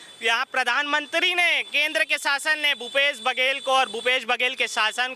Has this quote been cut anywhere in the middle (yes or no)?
no